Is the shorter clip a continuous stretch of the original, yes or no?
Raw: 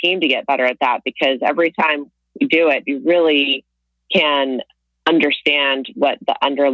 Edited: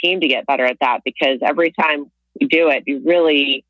yes